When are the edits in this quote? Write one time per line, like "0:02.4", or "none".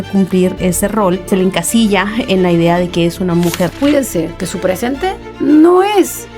0:01.3
0:03.7